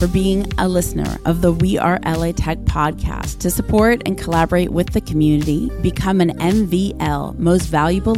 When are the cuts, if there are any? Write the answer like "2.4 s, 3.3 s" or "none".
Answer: none